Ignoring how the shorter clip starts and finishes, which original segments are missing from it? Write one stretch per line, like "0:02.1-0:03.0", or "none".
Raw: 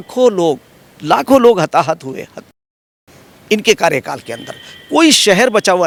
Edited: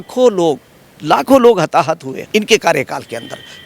0:02.1-0:03.3